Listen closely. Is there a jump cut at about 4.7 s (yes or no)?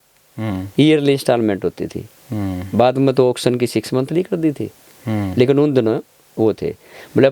no